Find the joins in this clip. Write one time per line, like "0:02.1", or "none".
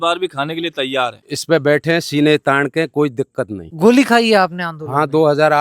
0:01.2
0:03.7